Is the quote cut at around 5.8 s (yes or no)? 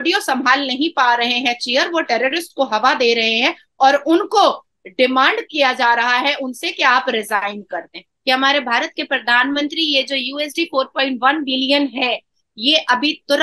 no